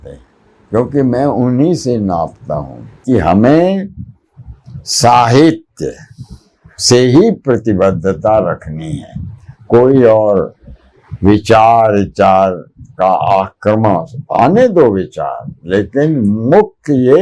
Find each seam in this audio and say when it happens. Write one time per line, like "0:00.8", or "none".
0:03.0